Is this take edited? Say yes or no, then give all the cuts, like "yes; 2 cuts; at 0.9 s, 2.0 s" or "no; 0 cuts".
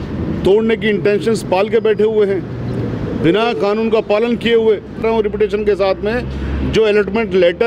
yes; 1 cut; at 5.0 s